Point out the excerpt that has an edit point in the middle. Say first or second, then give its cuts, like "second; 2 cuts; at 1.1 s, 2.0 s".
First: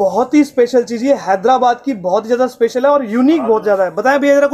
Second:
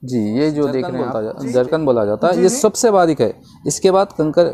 second; 1 cut; at 1.1 s